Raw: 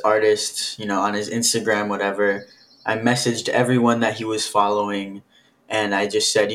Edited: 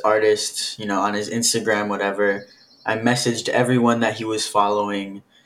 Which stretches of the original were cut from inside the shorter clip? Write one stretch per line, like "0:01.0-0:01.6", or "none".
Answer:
none